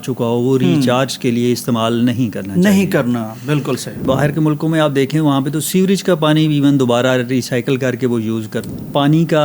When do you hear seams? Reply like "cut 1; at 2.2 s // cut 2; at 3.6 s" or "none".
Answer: cut 1; at 4.0 s // cut 2; at 8.6 s